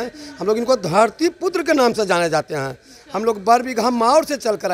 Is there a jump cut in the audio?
no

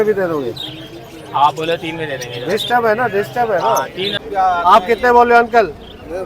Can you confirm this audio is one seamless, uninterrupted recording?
no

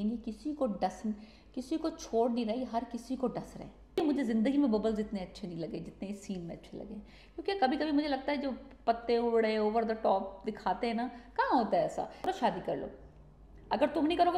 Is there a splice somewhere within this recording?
yes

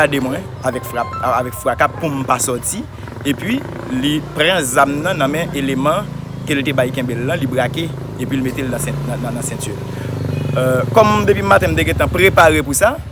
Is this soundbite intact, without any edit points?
yes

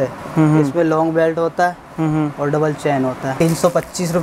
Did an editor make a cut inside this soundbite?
yes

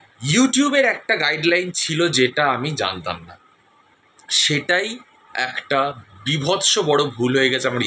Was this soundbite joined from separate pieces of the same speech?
no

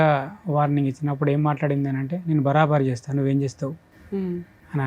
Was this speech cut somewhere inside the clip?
no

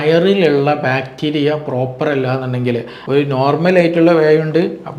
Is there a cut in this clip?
yes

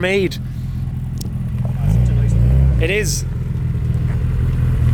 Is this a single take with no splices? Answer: yes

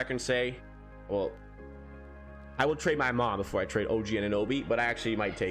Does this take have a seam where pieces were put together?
no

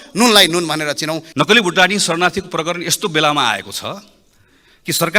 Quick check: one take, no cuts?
no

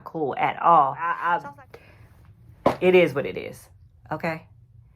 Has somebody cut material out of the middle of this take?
yes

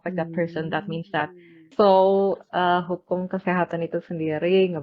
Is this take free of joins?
no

